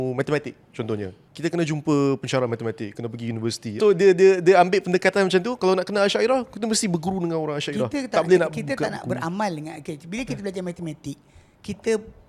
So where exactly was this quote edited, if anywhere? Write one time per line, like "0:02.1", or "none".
0:01.2
0:03.8